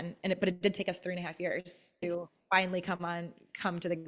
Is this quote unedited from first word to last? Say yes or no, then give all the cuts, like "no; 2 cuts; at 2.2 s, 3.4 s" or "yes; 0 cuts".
no; 1 cut; at 2.1 s